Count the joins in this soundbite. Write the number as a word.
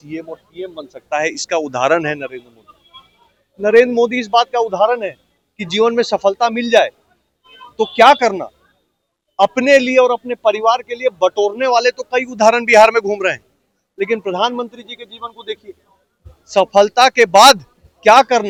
zero